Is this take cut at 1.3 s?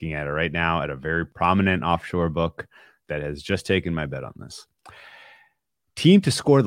yes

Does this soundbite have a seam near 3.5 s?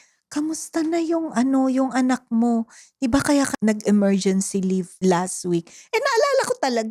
yes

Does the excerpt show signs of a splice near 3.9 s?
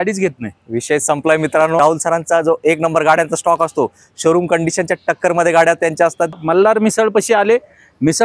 no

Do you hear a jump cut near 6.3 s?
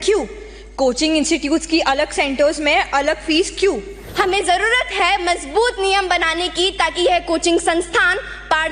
no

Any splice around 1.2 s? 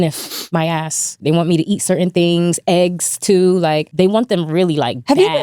yes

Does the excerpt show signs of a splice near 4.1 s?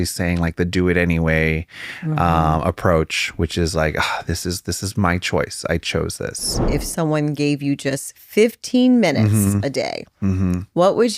no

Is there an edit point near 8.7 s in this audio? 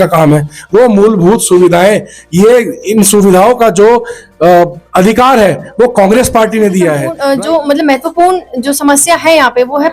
no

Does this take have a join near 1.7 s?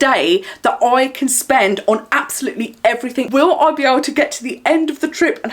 no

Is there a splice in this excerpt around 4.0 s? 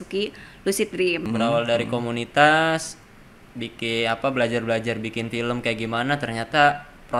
no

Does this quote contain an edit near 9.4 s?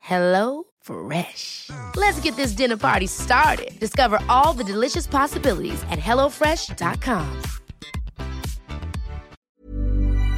yes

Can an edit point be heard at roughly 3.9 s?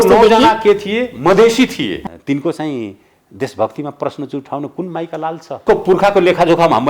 no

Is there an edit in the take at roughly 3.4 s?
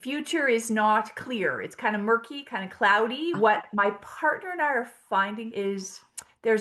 yes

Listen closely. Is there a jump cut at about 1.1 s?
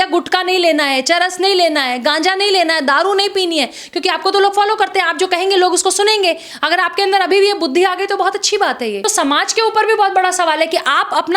no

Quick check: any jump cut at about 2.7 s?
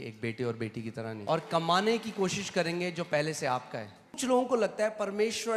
no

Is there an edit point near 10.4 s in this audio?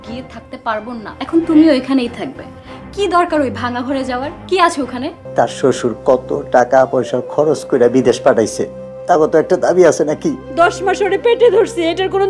yes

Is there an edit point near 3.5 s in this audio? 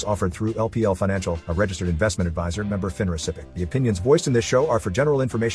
yes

